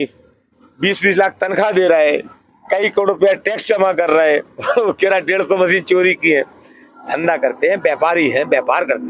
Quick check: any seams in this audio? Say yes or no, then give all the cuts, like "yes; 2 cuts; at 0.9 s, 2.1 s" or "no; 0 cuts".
no; 0 cuts